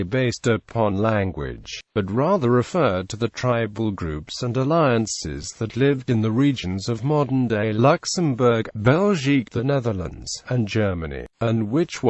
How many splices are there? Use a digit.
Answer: 1